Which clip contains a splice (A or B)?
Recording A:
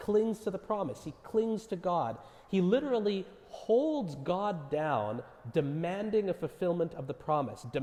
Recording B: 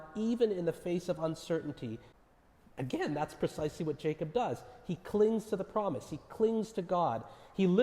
B